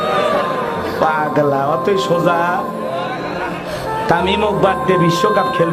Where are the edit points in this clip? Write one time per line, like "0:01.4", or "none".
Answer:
none